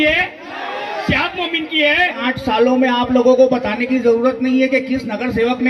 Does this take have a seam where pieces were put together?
yes; 1 cut; at 2.2 s

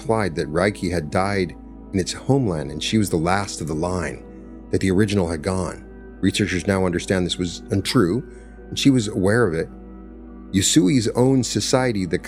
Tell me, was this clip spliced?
no; 0 cuts

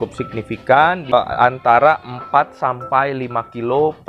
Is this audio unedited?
no; 1 cut; at 1.1 s

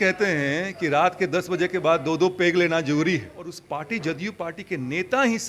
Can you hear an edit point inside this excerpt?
yes; 1 cut; at 3.6 s

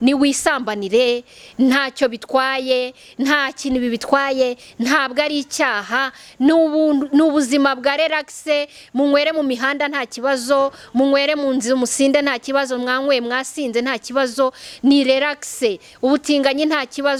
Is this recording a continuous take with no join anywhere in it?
yes; 0 cuts

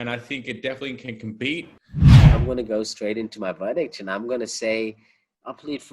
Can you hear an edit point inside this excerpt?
yes; 2 cuts; at 1.8 s, 2.3 s

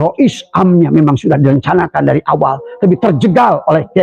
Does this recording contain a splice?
no; 0 cuts

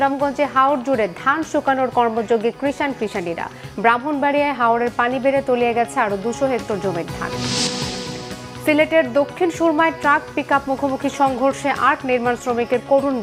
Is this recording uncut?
yes; 0 cuts

